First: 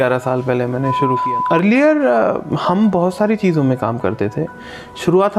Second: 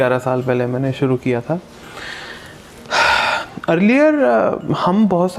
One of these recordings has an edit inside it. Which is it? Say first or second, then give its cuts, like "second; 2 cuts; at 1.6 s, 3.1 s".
first; 1 cut; at 1.2 s